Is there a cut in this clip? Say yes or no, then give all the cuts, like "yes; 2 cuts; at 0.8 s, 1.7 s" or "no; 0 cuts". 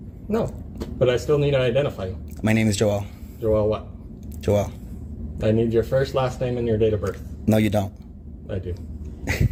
no; 0 cuts